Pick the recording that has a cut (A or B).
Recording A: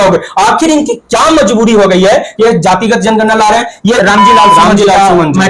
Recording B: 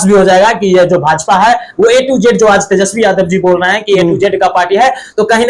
A